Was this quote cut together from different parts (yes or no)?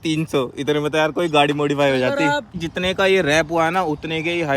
yes